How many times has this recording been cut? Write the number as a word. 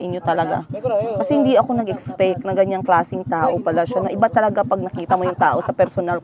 zero